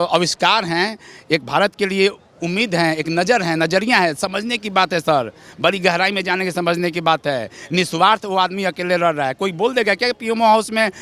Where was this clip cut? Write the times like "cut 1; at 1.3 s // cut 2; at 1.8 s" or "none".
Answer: none